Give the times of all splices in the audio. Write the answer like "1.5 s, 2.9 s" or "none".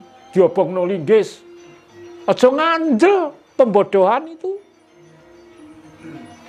none